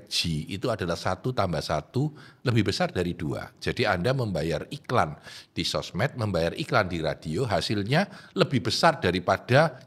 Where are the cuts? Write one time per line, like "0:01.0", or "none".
none